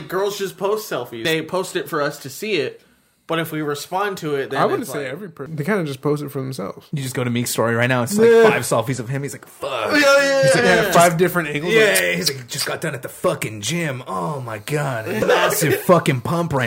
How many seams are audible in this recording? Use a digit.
4